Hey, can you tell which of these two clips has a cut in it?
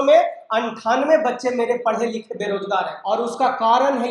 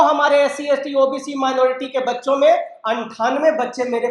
first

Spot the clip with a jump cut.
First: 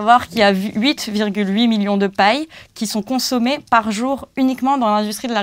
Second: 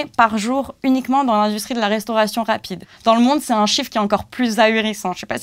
second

